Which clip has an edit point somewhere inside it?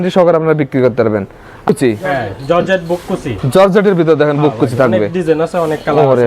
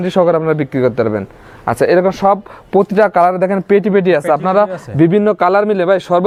first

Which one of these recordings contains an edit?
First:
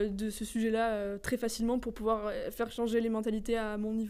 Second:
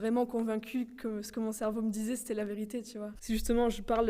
second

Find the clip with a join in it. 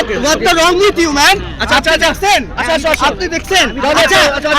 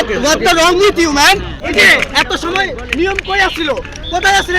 second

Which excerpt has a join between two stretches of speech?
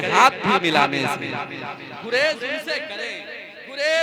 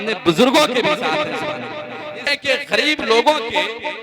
second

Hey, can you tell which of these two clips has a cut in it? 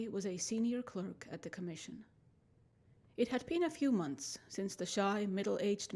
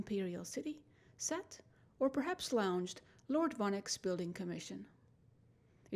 first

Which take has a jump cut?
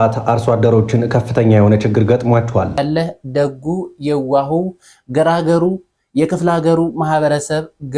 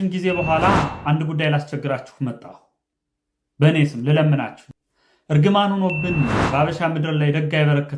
first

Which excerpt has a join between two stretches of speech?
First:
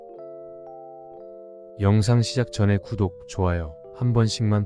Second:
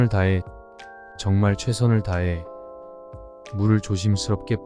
first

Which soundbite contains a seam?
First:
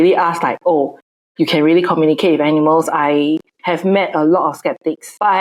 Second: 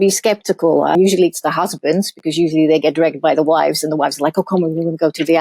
second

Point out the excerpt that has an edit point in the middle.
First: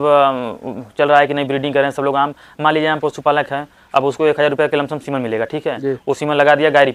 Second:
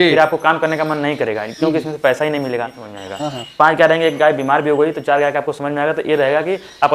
second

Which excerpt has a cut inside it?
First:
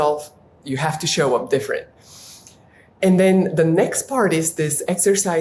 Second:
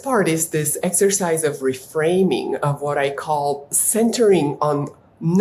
second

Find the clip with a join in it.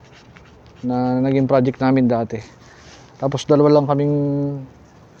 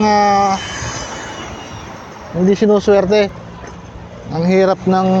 second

